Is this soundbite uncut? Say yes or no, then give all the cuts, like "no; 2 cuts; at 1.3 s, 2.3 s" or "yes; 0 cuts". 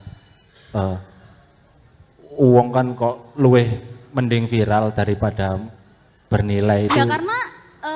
no; 1 cut; at 7.0 s